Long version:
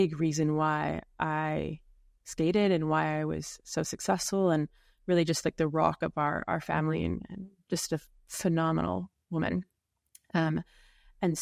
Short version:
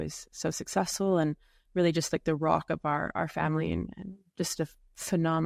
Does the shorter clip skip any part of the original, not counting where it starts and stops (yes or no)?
no